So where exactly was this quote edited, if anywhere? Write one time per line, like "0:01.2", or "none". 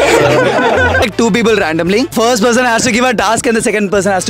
0:01.0
0:02.1